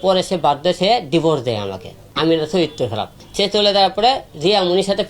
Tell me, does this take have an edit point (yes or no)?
yes